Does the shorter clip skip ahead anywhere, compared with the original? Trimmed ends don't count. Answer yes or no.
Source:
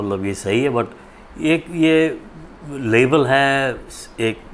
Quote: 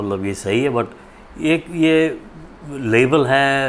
no